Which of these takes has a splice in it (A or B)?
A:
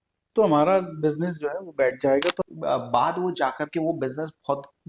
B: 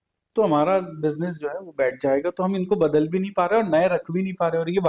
A